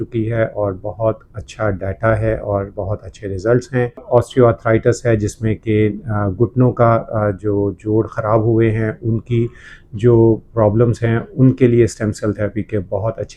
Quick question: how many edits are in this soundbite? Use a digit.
1